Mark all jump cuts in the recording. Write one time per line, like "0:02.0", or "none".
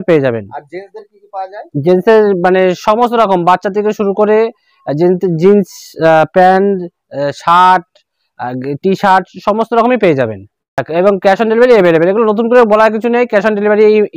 0:10.8